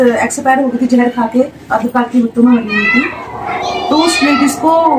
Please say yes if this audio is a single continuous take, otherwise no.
yes